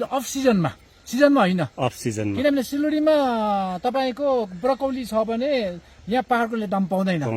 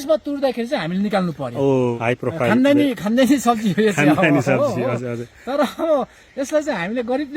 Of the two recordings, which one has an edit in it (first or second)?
second